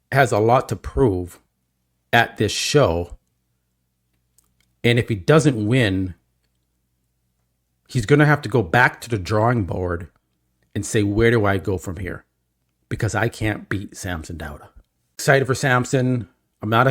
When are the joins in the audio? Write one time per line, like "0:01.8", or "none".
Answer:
0:15.2

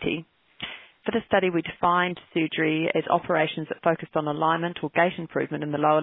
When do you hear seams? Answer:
none

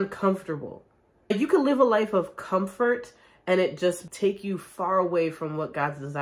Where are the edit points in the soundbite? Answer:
0:01.3
0:04.0

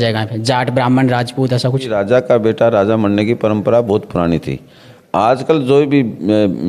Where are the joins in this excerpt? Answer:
0:02.0

